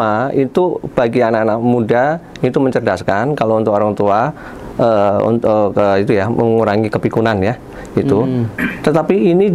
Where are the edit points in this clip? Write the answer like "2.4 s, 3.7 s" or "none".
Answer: none